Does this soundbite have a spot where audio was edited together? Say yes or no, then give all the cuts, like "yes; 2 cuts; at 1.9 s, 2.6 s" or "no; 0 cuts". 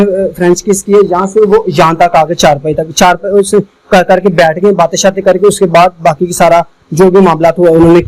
no; 0 cuts